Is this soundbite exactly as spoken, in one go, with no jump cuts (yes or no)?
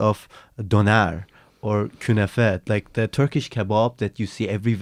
yes